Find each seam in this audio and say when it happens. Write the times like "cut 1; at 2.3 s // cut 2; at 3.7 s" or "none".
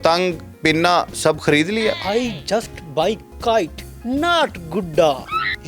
cut 1; at 2.0 s